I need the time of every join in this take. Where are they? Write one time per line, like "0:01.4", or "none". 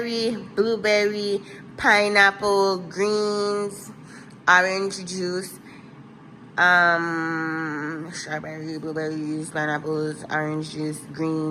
none